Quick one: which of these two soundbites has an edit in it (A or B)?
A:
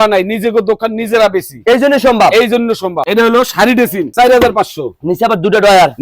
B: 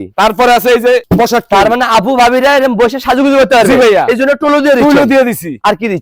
A